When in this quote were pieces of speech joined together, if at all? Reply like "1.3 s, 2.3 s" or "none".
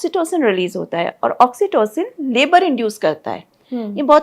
none